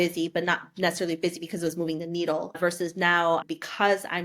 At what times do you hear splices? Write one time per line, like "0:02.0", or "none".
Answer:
0:02.5